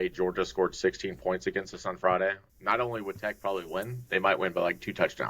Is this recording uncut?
no; 1 cut; at 2.5 s

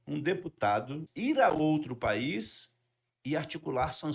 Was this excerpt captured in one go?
no; 1 cut; at 1.1 s

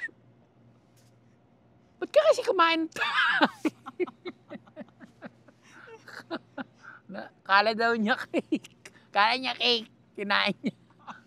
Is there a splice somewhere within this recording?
no; 0 cuts

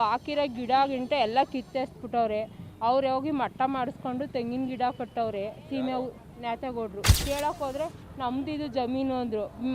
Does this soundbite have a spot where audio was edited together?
yes; 1 cut; at 7.2 s

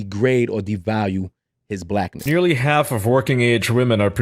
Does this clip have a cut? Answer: yes; 1 cut; at 2.2 s

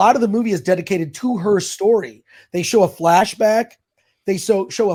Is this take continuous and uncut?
yes; 0 cuts

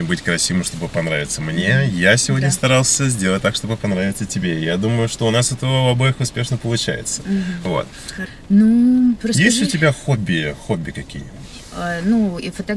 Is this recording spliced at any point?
no; 0 cuts

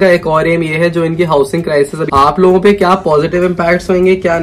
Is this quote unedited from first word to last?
no; 1 cut; at 2.1 s

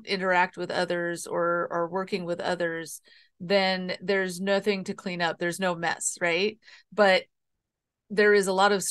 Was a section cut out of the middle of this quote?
yes; 1 cut; at 6.7 s

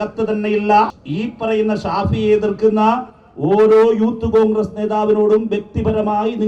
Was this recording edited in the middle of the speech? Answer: yes; 1 cut; at 1.0 s

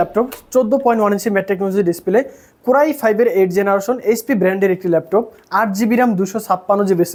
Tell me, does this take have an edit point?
no; 0 cuts

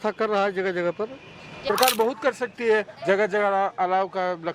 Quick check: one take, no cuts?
no; 1 cut; at 1.7 s

